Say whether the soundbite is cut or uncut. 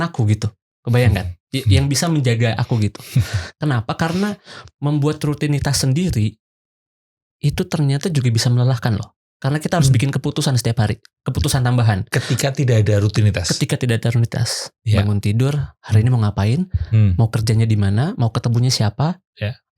uncut